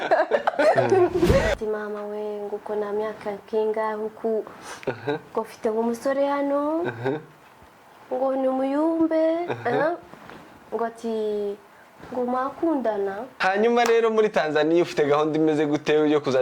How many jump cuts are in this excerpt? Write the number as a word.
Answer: two